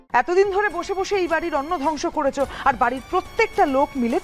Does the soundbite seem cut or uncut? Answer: uncut